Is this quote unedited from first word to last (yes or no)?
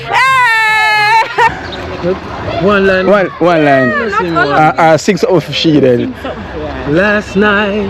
no